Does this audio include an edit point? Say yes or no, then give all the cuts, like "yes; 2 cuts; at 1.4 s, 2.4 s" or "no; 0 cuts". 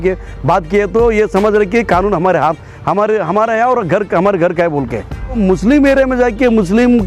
yes; 1 cut; at 5.4 s